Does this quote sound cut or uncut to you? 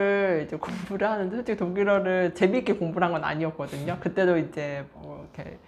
uncut